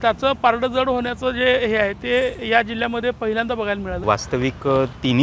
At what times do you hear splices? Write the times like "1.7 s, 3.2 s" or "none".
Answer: 4.0 s